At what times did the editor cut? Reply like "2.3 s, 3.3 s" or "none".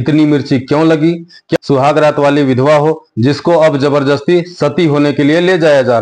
1.5 s